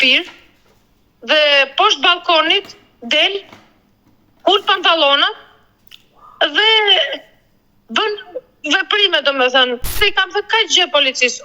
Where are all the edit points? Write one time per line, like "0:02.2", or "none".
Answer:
0:10.0